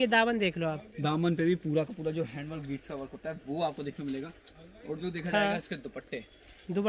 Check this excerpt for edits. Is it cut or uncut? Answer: uncut